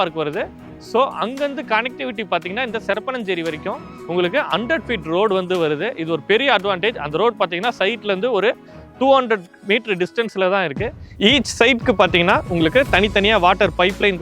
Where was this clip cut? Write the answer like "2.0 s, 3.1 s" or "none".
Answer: 11.2 s

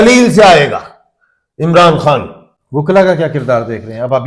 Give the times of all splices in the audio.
none

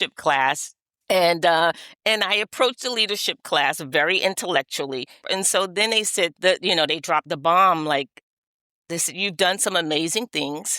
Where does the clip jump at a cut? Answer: 5.2 s, 6.4 s

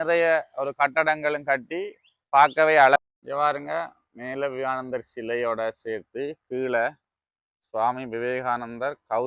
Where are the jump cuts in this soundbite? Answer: 3.0 s

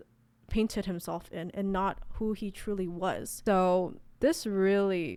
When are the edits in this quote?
none

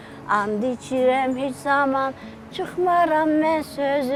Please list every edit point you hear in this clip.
none

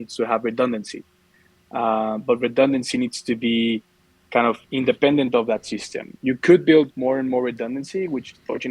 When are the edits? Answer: none

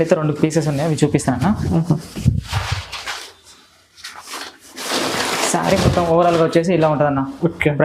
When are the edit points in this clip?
3.0 s

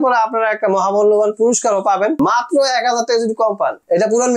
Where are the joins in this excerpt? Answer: 2.2 s

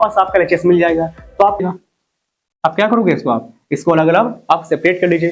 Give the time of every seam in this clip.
1.6 s

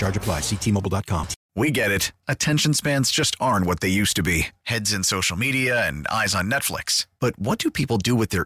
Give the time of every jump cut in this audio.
1.4 s

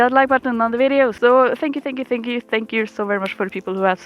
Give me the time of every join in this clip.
1.2 s

